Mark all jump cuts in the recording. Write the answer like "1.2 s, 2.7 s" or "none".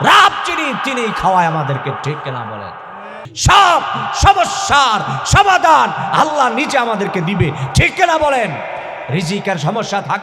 3.3 s